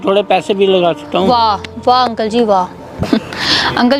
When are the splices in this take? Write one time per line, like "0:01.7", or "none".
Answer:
0:03.0